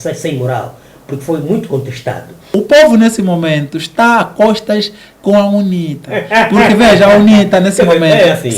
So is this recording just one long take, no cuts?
no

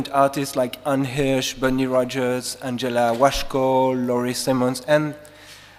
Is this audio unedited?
yes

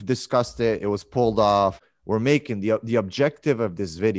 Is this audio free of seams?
no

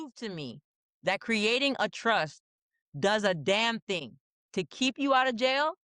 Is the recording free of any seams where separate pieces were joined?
yes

